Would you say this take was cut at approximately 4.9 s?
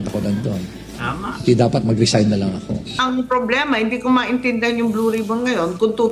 no; 1 cut; at 3.0 s

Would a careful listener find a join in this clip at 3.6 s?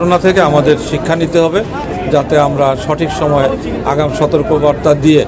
no; 1 cut; at 1.8 s

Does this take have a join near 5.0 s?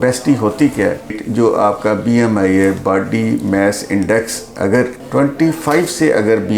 yes; 2 cuts; at 1.2 s, 5.0 s

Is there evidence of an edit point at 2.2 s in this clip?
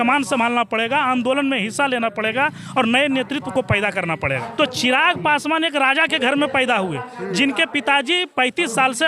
no; 1 cut; at 4.4 s

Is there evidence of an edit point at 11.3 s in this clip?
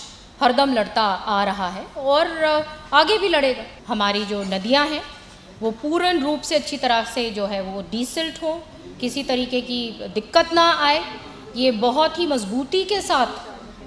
no; 1 cut; at 3.7 s

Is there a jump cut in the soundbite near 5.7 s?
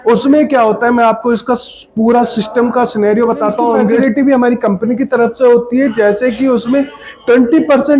no; 1 cut; at 4.0 s

